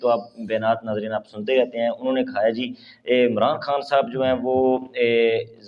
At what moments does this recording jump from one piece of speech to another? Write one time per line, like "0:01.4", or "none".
none